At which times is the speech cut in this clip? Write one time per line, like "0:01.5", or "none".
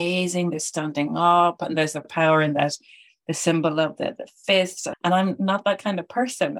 0:04.8